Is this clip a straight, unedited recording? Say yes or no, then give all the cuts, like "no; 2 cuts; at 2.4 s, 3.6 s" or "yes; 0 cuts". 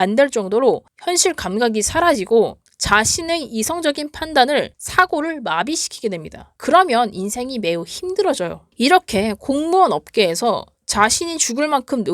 no; 1 cut; at 8.6 s